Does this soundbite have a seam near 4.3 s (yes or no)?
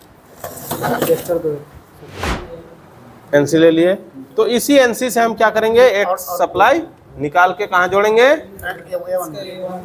no